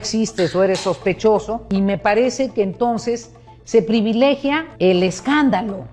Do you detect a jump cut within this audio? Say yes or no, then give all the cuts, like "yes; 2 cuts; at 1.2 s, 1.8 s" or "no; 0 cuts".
yes; 2 cuts; at 1.6 s, 4.7 s